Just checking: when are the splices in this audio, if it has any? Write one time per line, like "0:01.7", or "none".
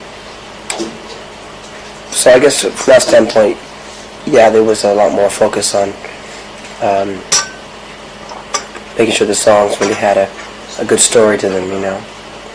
none